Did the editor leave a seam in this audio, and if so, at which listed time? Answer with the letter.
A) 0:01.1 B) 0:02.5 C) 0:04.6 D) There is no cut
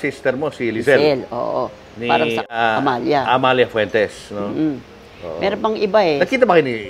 B